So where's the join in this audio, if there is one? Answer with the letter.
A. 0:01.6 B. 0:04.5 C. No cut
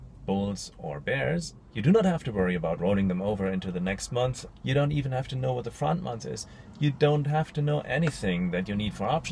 A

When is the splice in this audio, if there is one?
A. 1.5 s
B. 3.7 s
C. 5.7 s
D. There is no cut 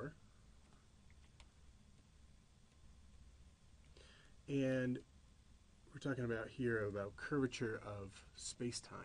D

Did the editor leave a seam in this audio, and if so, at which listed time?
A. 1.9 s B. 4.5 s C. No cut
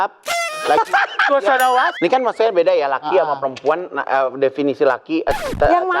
A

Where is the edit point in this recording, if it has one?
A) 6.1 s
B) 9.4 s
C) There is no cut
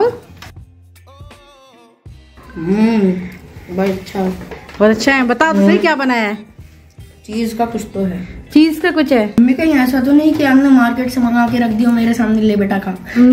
B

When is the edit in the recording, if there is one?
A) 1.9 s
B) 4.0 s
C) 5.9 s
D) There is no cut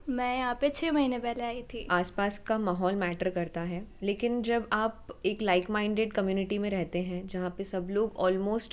A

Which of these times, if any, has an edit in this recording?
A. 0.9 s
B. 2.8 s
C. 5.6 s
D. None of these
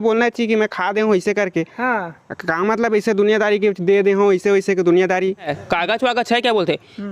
C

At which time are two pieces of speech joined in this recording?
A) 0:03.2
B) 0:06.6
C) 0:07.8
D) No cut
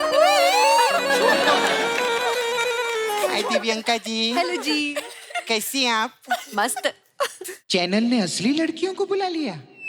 A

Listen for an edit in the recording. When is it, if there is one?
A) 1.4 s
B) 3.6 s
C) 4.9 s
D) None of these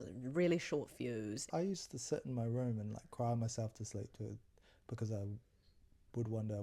A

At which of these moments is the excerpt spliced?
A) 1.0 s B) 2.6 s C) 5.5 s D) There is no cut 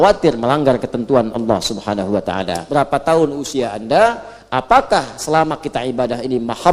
B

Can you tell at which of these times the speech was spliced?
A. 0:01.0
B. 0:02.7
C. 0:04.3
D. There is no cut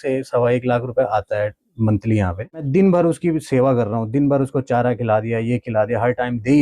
B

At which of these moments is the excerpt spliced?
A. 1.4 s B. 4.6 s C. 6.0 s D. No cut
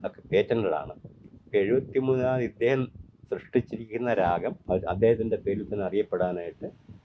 B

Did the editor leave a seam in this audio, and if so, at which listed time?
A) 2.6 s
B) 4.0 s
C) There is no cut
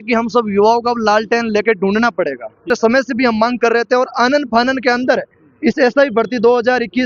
A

